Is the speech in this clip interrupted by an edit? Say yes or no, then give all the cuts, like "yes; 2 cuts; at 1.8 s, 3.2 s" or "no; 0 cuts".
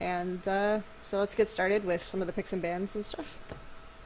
yes; 1 cut; at 1.6 s